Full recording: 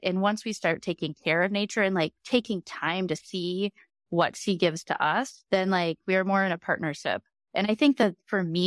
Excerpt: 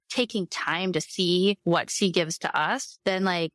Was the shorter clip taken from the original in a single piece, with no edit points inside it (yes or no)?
no